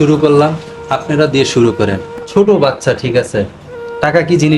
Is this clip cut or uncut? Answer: cut